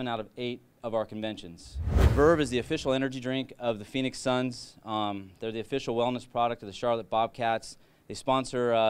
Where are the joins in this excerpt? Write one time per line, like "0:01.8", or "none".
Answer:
0:02.0